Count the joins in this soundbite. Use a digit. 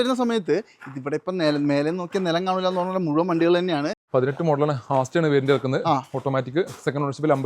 1